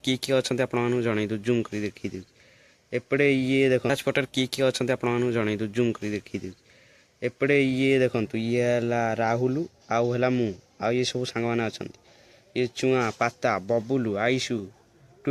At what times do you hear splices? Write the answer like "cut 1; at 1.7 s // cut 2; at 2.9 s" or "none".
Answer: cut 1; at 3.9 s

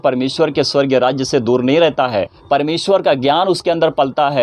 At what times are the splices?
cut 1; at 2.3 s

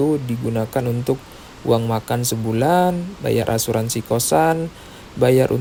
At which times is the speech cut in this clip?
none

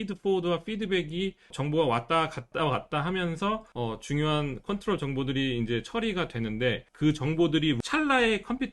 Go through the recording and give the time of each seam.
cut 1; at 1.5 s // cut 2; at 2.5 s // cut 3; at 3.7 s // cut 4; at 6.9 s // cut 5; at 7.8 s

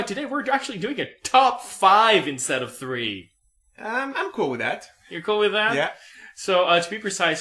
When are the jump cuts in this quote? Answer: none

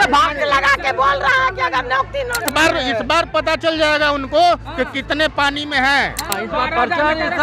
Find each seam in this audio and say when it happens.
cut 1; at 2.5 s // cut 2; at 6.3 s

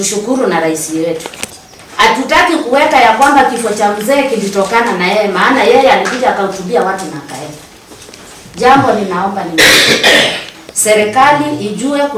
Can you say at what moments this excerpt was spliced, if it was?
none

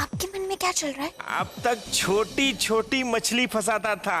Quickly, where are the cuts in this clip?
cut 1; at 1.2 s

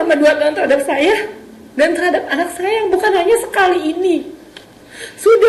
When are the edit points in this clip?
none

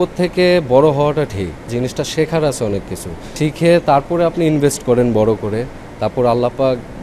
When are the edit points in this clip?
none

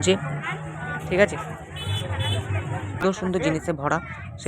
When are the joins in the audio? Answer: cut 1; at 3.0 s

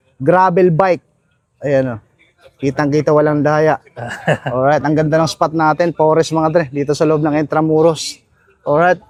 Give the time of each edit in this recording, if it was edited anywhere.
none

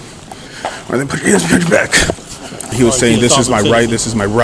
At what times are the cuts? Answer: cut 1; at 2.7 s

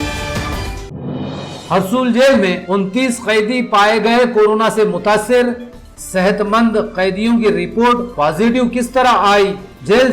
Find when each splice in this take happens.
cut 1; at 1.5 s

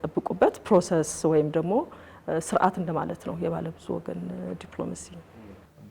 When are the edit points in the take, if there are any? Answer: none

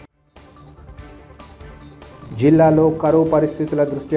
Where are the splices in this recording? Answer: cut 1; at 2.1 s

